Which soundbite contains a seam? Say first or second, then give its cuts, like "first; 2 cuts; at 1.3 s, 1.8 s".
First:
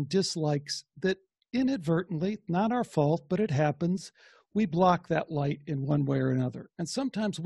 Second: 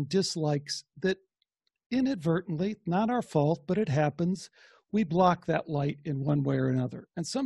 first; 1 cut; at 1.3 s